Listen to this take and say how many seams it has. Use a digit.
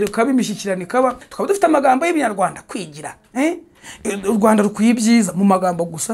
1